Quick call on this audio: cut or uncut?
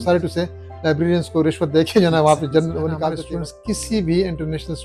cut